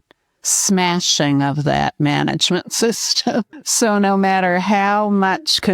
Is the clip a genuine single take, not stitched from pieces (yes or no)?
no